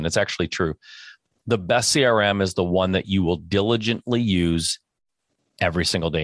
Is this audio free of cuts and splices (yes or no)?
yes